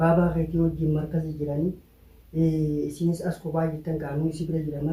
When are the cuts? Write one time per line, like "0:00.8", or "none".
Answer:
none